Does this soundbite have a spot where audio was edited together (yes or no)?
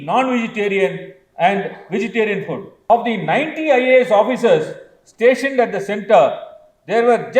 yes